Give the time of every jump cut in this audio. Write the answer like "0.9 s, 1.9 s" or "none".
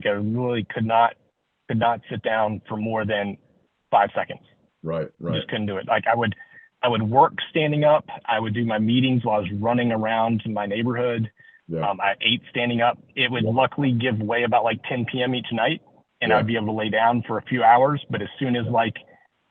none